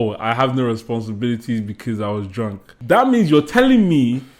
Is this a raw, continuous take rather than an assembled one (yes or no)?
no